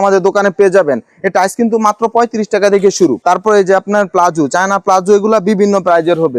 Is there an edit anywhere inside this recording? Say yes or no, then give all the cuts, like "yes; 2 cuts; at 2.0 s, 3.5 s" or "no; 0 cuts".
no; 0 cuts